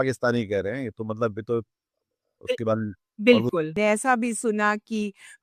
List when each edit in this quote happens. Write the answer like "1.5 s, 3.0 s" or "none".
3.7 s